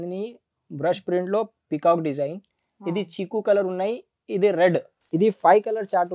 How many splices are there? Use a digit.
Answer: 1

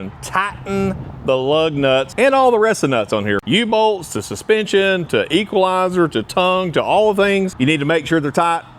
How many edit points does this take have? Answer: 3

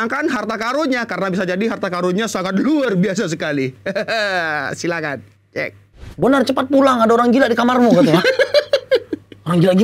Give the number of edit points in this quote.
1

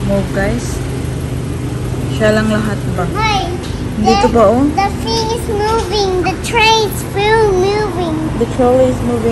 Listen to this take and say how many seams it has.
0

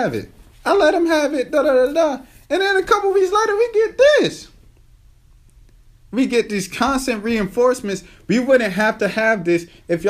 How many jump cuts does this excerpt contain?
0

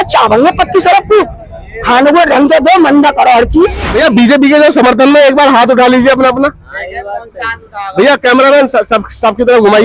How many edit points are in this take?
1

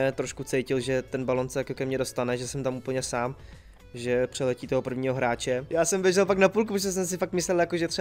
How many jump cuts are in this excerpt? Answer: 1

